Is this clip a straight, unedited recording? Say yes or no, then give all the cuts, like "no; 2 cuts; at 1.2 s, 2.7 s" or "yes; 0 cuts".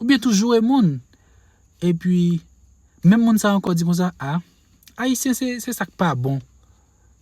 no; 1 cut; at 3.6 s